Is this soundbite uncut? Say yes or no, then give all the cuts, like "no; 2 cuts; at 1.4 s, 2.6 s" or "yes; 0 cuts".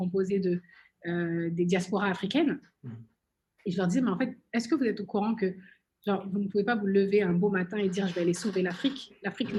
yes; 0 cuts